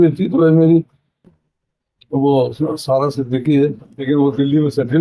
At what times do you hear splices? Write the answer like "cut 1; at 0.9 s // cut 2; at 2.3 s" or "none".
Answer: cut 1; at 3.9 s